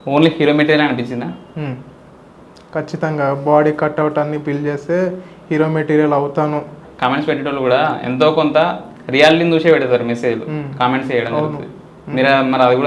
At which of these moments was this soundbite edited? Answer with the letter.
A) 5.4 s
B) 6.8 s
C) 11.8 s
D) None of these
B